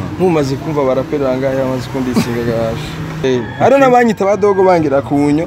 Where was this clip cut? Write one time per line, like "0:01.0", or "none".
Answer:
0:03.2

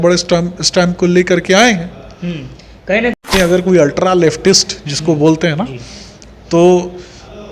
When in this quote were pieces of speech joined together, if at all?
0:03.1

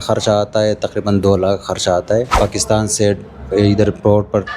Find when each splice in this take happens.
0:02.3

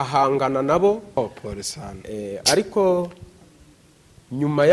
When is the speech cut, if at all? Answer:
0:01.2

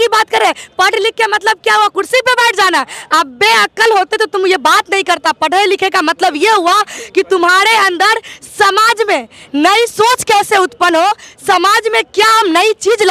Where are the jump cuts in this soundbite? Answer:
none

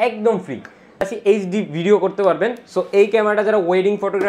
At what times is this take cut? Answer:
0:01.0

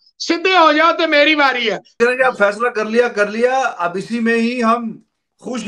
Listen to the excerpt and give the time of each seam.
0:01.8

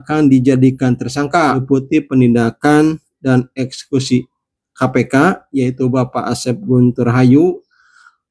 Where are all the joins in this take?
0:01.6

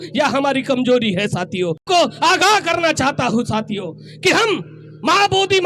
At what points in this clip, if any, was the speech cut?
0:01.8

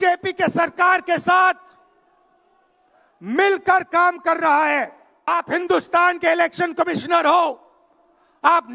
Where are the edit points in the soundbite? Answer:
0:05.3

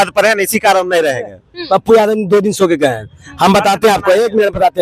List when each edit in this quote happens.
none

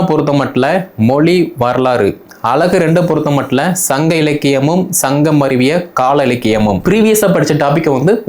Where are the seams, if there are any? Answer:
0:06.8

